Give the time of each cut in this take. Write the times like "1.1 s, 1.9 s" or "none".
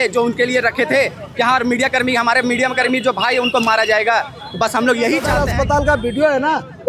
5.4 s